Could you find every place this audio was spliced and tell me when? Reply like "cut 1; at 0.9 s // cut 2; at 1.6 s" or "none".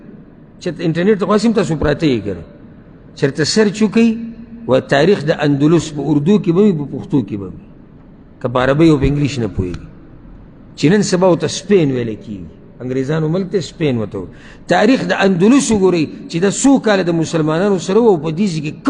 none